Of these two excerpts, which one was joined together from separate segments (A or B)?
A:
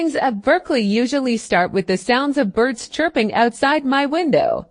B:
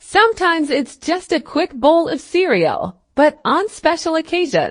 B